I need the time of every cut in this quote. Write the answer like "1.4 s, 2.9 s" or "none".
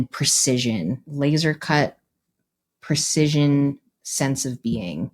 1.0 s